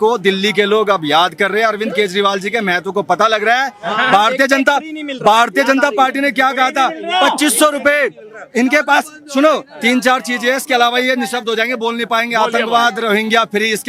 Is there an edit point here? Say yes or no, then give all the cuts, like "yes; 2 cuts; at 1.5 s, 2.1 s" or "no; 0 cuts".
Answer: no; 0 cuts